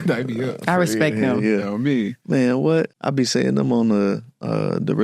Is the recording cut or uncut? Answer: cut